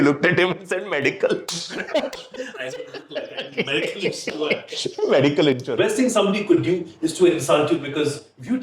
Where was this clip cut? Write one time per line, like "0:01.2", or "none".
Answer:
0:05.7